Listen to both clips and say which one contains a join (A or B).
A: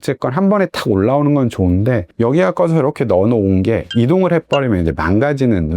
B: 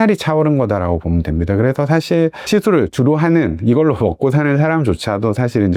A